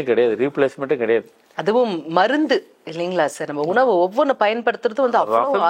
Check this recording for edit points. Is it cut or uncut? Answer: uncut